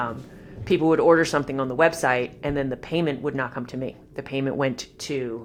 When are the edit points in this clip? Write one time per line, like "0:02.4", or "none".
none